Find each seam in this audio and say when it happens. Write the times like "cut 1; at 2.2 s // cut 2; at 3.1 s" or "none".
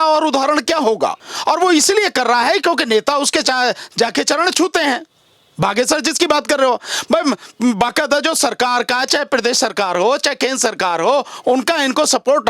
cut 1; at 1.3 s